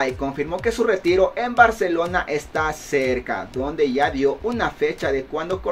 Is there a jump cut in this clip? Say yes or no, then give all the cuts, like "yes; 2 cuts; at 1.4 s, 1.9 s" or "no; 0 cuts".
no; 0 cuts